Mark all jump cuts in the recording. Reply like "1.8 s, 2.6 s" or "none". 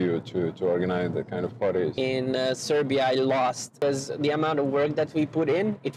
1.9 s, 3.7 s